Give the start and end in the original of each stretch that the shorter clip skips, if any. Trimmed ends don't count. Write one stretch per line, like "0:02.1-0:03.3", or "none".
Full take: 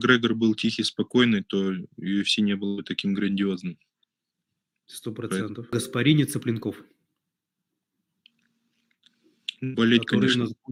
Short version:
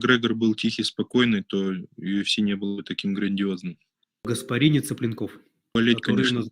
0:04.1-0:05.6
0:07.1-0:09.7

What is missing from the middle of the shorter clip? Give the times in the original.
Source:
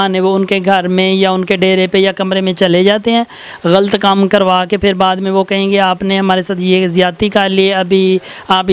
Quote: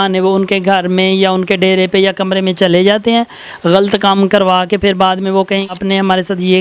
0:05.7-0:05.9

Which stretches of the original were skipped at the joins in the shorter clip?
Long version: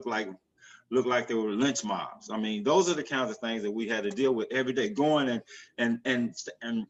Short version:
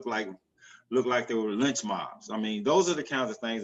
none

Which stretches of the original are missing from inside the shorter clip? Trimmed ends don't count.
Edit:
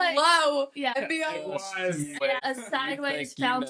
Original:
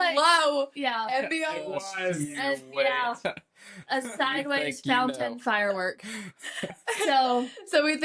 0:01.0-0:01.2
0:02.5-0:03.7

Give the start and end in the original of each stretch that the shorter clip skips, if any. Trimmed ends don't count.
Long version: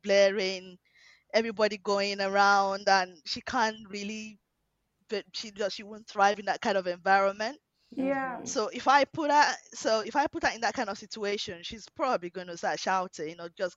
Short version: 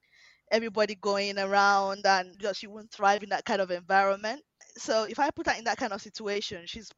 0:03.1-0:05.5
0:07.8-0:09.6

